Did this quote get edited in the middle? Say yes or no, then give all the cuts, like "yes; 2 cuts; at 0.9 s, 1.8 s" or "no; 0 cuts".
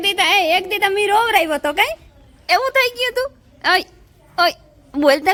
no; 0 cuts